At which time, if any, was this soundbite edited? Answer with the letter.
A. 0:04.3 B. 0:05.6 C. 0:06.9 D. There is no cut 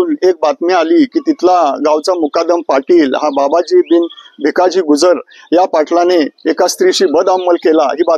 D